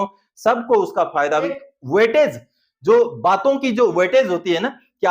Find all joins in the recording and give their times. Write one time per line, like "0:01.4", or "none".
0:01.6